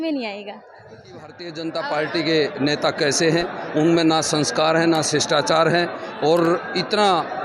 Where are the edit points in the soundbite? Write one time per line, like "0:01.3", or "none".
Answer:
0:01.5

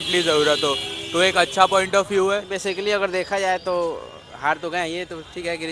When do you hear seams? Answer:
0:02.5

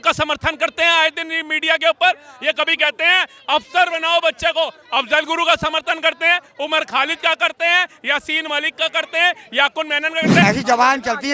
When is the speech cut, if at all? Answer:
0:10.4

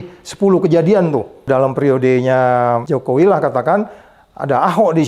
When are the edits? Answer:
0:01.5
0:02.8

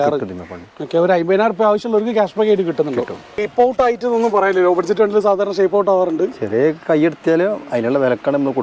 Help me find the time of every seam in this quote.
0:03.4

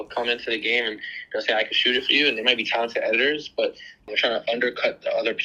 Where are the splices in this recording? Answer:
0:04.1

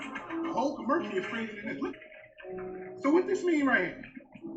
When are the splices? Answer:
0:02.0

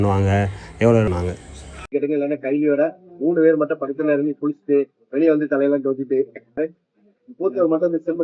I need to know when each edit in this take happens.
0:01.1
0:06.6

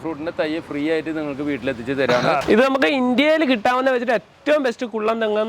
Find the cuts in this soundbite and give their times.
0:02.4

